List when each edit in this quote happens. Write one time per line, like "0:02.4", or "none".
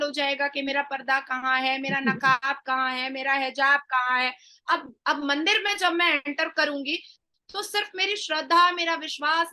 none